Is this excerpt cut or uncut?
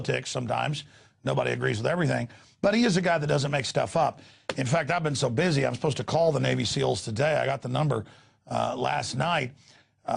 uncut